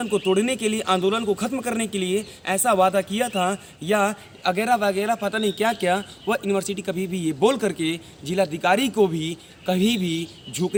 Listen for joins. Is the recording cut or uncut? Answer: uncut